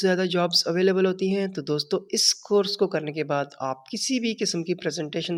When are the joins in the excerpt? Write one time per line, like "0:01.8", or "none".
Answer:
none